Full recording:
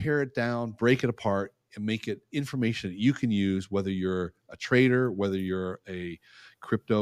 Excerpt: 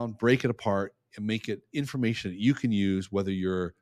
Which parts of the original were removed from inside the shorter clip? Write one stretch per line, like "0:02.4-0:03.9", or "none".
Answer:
none

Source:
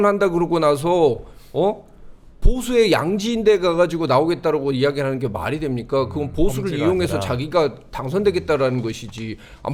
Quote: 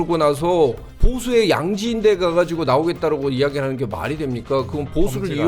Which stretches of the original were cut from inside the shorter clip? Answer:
0:01.3-0:02.3

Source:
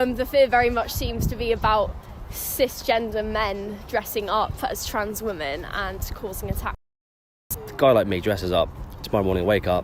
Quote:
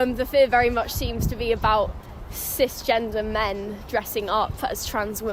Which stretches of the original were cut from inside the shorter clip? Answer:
none

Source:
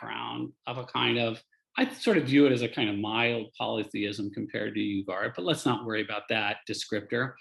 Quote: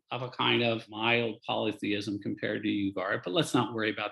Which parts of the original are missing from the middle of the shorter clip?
0:01.5-0:03.1

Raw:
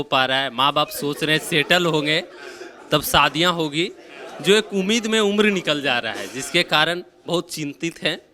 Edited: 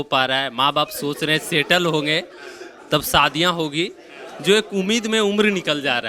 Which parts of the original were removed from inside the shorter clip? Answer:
none

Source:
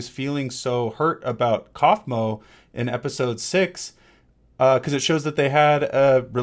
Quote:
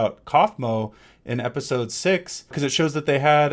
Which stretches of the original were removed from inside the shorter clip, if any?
0:04.0-0:04.9

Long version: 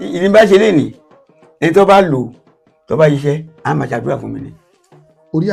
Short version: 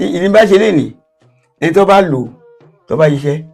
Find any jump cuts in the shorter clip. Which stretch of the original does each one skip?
none

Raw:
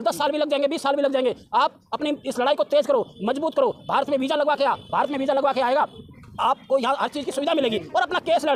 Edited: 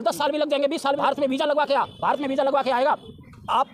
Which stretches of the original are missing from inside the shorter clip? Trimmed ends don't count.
0:01.0-0:03.9

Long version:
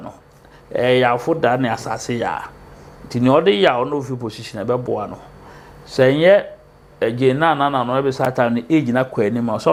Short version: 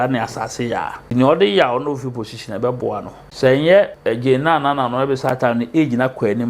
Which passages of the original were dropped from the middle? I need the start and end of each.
0:02.5-0:03.0
0:05.2-0:05.7
0:06.5-0:06.9

